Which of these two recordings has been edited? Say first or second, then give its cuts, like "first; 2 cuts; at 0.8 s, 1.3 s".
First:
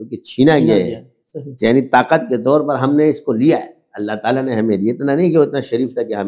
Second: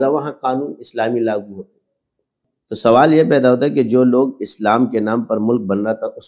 second; 1 cut; at 2.5 s